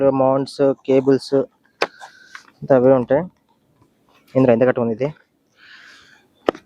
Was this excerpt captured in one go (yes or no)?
yes